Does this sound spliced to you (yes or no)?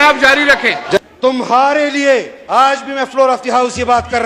yes